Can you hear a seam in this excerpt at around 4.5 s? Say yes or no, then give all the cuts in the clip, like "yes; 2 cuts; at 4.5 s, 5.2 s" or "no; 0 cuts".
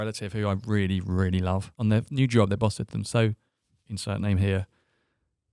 no; 1 cut; at 1.7 s